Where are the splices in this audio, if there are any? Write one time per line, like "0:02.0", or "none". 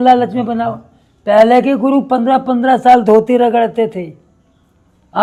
none